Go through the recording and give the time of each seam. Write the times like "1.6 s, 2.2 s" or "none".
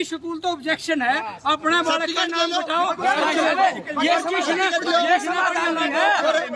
none